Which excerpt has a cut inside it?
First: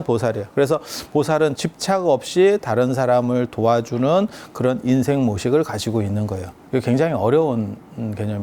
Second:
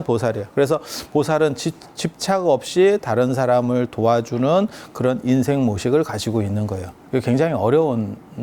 first; 1 cut; at 1.6 s

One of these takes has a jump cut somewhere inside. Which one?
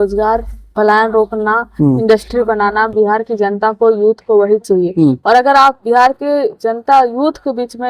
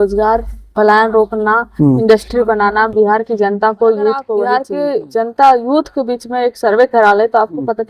second; 1 cut; at 4.6 s

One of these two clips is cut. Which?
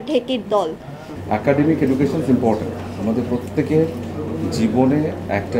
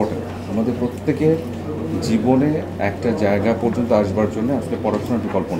first; 1 cut; at 1.1 s

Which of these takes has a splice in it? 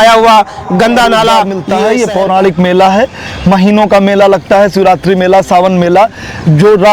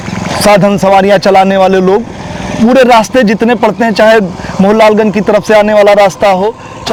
first; 1 cut; at 1.6 s

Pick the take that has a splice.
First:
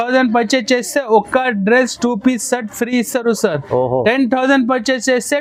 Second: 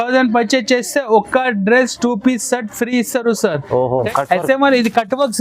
second; 1 cut; at 4.1 s

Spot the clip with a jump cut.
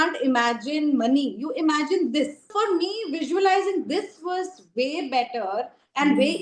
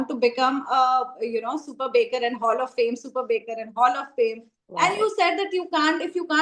first; 1 cut; at 2.5 s

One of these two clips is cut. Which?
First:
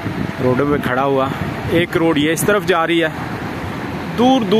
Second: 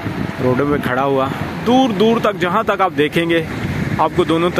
second; 1 cut; at 1.5 s

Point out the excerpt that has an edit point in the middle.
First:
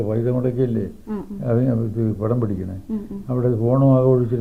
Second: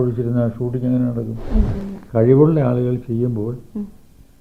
second; 1 cut; at 1.8 s

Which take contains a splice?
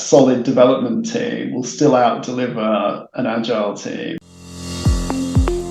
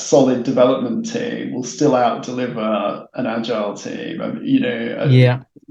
first; 1 cut; at 4.1 s

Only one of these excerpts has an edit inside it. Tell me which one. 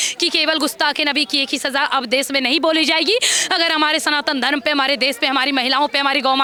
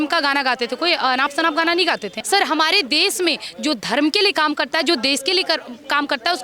second; 1 cut; at 2.1 s

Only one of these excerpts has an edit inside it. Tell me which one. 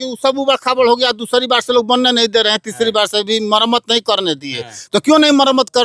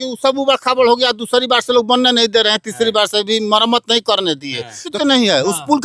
second; 1 cut; at 4.9 s

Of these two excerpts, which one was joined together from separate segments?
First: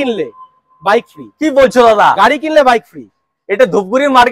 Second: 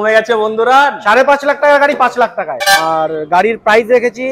second; 1 cut; at 2.8 s

